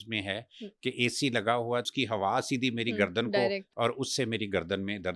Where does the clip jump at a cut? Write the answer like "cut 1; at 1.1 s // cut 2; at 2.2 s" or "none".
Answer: cut 1; at 1.9 s // cut 2; at 3.7 s